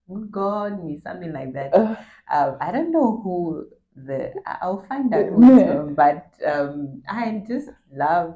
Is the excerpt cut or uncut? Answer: uncut